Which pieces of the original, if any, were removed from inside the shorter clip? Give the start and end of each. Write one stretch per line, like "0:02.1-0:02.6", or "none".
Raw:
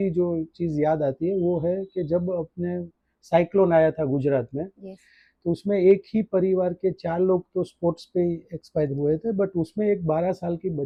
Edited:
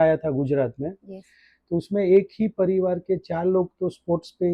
none